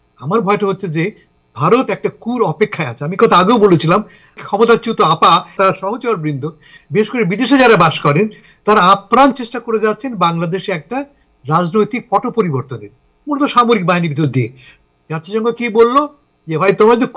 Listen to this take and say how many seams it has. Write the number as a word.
three